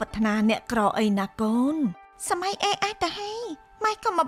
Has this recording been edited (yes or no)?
no